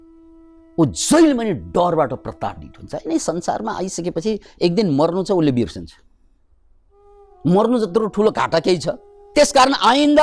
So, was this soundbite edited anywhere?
yes; 1 cut; at 9.1 s

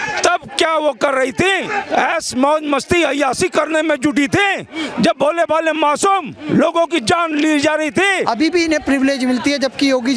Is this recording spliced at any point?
yes; 2 cuts; at 1.7 s, 8.2 s

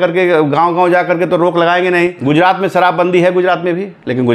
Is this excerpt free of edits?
no; 1 cut; at 2.2 s

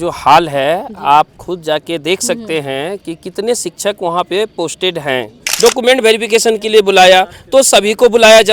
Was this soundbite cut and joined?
yes; 1 cut; at 5.4 s

